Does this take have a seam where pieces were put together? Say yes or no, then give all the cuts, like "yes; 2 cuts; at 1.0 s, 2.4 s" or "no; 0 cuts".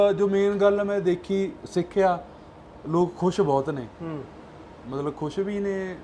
no; 0 cuts